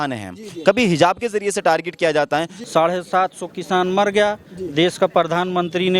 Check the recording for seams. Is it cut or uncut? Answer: cut